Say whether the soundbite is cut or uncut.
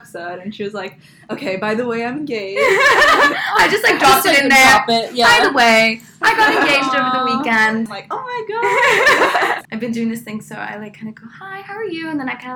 cut